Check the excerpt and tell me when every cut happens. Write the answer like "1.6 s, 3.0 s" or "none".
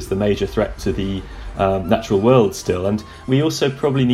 3.2 s

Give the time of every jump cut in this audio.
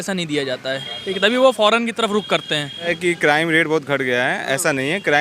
3.0 s

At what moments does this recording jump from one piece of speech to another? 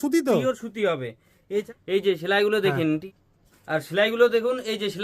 1.7 s, 3.0 s

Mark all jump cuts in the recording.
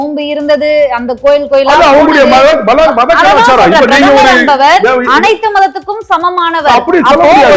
none

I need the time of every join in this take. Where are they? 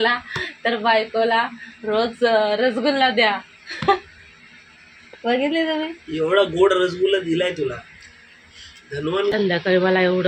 9.3 s

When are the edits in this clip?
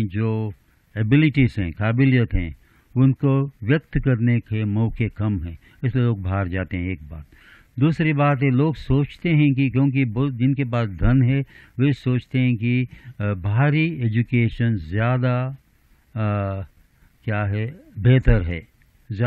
none

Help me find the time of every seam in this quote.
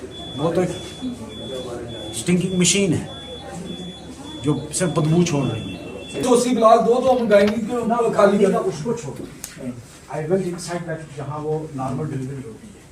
6.2 s

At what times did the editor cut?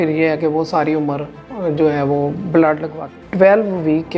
3.2 s

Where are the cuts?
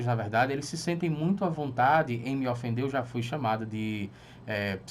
none

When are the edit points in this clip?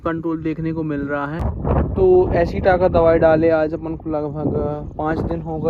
1.4 s

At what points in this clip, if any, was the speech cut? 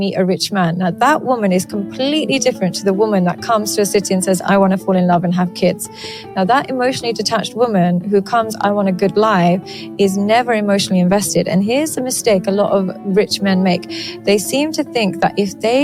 none

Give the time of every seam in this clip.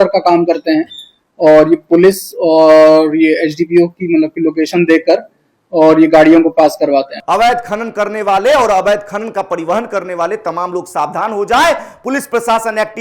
7.1 s

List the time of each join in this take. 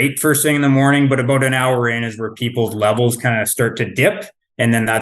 none

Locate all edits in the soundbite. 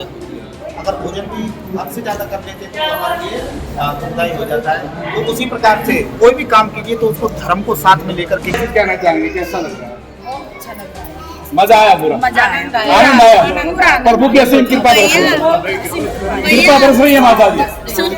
8.6 s

